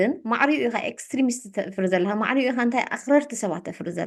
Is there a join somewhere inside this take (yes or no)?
no